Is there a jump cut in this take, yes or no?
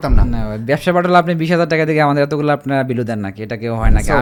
no